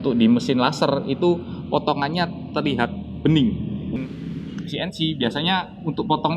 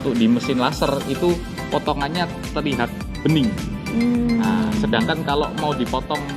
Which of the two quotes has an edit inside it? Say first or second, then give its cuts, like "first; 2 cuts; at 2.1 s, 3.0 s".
first; 1 cut; at 3.9 s